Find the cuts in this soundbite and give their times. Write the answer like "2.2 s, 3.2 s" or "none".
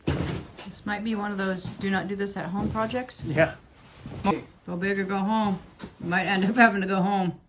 4.3 s